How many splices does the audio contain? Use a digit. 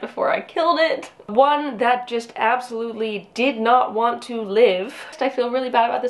2